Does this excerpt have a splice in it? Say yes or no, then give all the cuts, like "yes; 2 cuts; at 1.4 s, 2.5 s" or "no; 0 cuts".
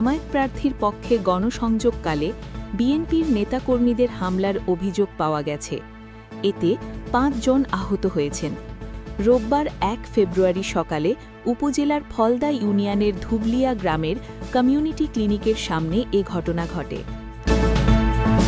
yes; 1 cut; at 17.3 s